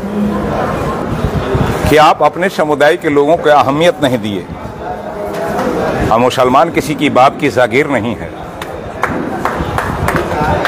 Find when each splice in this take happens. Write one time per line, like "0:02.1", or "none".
0:01.0